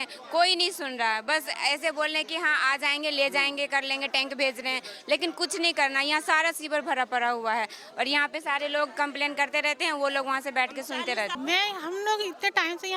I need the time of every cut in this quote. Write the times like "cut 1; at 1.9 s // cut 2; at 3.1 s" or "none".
cut 1; at 11.3 s